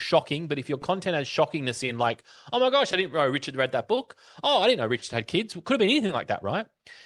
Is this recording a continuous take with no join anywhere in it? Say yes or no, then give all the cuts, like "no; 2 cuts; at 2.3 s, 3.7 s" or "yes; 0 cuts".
yes; 0 cuts